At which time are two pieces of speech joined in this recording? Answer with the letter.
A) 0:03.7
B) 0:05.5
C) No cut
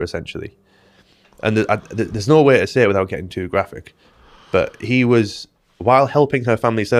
C